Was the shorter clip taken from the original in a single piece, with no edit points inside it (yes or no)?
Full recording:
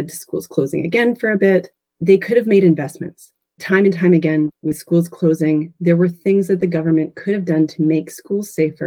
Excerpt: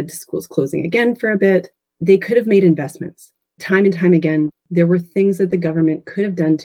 no